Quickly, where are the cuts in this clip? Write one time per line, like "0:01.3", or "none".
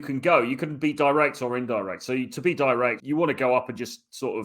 0:03.0